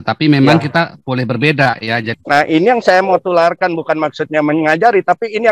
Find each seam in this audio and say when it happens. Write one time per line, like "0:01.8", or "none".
0:02.1